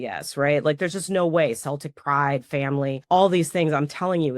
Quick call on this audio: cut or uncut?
cut